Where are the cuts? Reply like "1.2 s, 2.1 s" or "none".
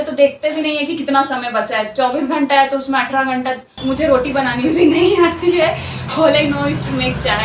3.8 s